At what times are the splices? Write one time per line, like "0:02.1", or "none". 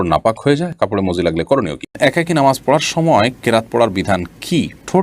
0:01.9